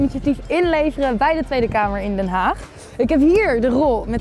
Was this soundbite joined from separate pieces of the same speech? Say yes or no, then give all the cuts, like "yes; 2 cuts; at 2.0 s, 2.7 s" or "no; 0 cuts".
no; 0 cuts